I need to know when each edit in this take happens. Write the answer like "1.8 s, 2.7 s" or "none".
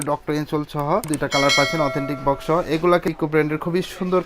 1.1 s, 3.1 s